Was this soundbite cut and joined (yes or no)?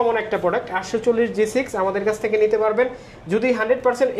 no